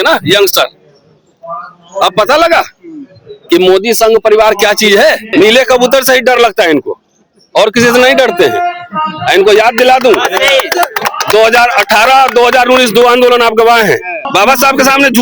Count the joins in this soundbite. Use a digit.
2